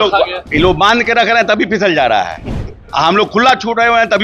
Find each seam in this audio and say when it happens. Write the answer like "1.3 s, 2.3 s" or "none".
none